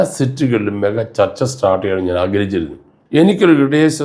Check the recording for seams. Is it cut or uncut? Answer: cut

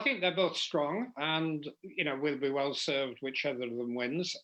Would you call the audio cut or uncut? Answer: uncut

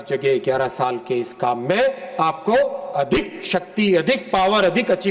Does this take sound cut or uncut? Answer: uncut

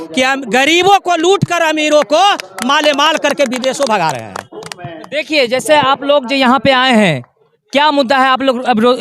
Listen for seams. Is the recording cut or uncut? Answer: uncut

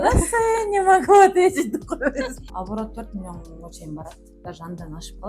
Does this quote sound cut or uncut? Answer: cut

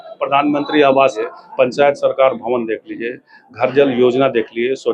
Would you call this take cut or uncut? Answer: cut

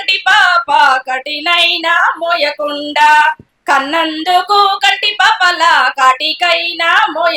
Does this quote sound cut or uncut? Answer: cut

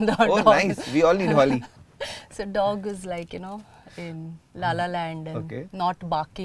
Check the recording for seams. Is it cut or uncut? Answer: uncut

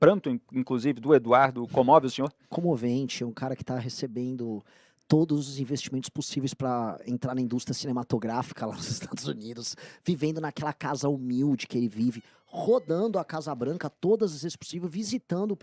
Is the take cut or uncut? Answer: uncut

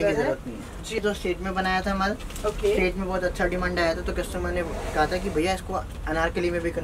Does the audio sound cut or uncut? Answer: cut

